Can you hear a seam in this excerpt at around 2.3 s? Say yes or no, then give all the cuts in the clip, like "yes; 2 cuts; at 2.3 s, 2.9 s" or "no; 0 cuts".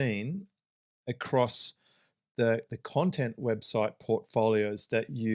no; 0 cuts